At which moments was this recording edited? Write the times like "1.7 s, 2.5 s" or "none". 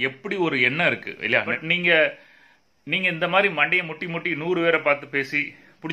1.6 s